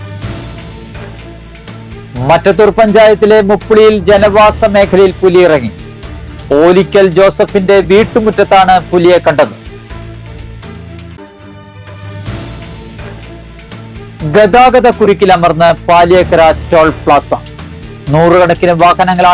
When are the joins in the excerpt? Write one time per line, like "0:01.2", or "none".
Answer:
0:01.8